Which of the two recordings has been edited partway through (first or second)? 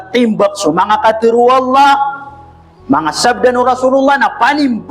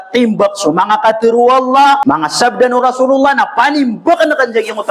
second